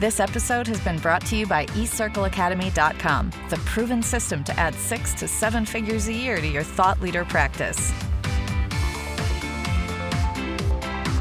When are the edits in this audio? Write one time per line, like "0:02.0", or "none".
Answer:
0:07.7

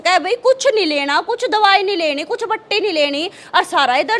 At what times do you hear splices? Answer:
none

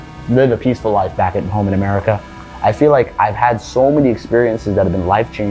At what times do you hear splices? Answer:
none

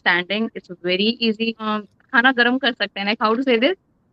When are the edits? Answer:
0:01.7

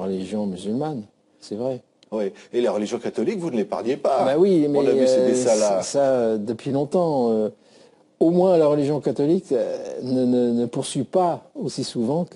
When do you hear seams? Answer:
0:09.7

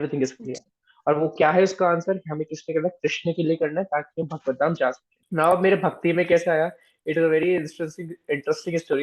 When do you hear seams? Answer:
0:05.1

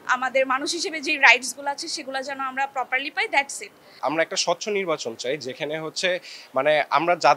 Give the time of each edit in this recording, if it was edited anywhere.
0:04.0

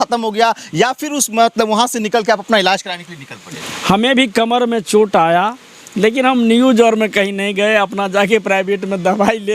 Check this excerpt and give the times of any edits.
0:03.6

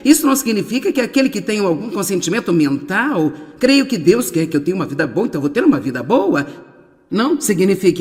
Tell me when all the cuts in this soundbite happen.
0:02.9

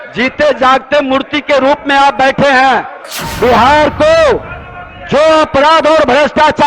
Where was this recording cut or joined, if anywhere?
0:03.0

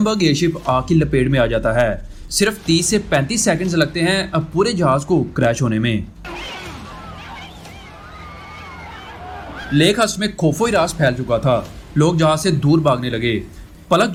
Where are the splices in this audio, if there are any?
none

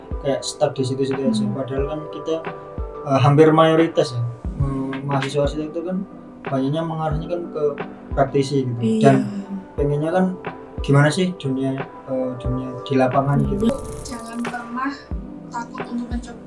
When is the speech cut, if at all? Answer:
0:13.7

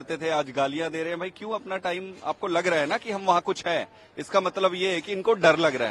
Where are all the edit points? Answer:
none

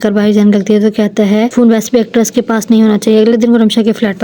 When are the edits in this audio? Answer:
0:01.5

